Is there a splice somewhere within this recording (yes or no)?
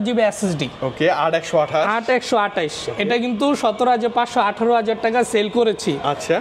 no